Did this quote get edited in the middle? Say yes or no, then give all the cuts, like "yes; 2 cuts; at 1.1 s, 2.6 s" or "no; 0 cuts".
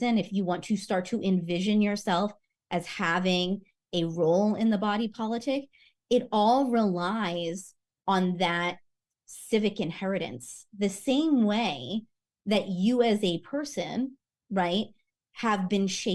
no; 0 cuts